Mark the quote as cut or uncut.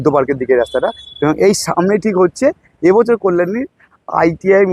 uncut